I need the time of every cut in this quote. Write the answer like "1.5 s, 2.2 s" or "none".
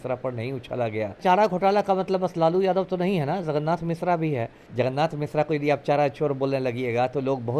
1.2 s, 4.6 s